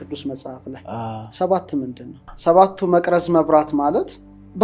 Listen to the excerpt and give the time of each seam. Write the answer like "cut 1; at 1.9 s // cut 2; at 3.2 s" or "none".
cut 1; at 2.3 s